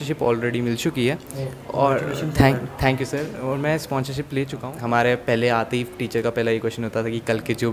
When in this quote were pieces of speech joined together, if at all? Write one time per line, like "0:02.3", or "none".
0:04.7

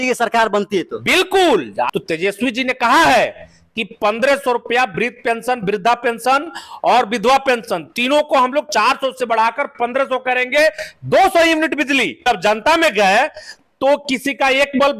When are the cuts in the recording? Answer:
0:01.9
0:12.1

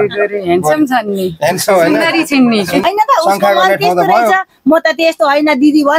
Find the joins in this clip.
0:02.8

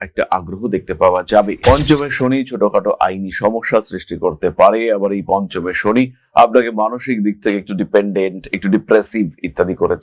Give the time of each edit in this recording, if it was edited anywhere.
0:01.5

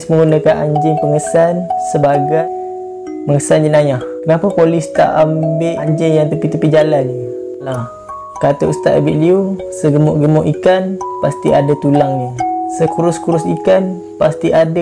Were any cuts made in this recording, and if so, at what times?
0:07.8

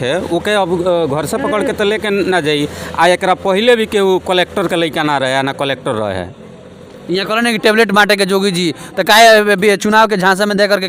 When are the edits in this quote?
none

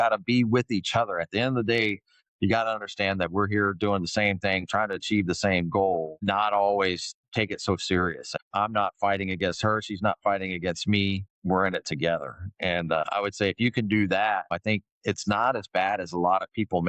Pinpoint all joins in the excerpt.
none

